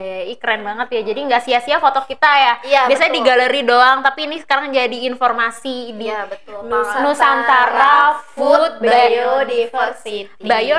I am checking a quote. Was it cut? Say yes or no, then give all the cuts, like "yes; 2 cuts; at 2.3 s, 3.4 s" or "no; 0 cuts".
no; 0 cuts